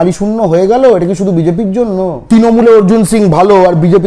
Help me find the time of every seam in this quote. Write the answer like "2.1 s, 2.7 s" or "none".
none